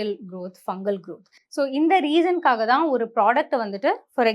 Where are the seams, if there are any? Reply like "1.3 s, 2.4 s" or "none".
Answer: none